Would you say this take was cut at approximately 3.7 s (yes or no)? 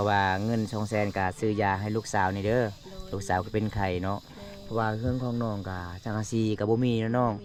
no